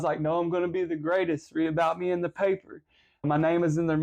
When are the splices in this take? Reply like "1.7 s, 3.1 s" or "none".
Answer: none

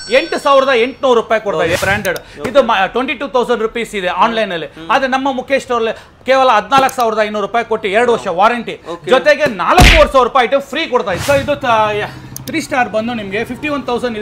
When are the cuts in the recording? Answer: 1.8 s, 11.2 s

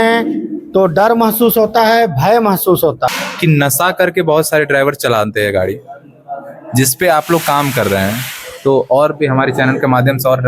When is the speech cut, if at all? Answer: 3.1 s

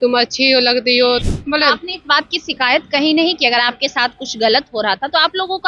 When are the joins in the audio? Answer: 1.2 s

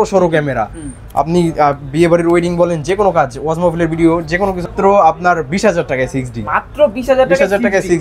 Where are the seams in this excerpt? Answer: 4.7 s

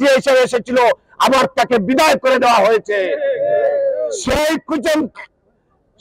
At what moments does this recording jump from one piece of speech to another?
none

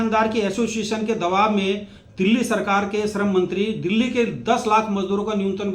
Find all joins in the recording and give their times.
none

